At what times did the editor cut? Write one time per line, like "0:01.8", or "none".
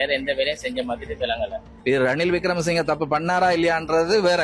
0:01.7